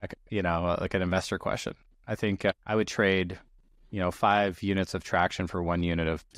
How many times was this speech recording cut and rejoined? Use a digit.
1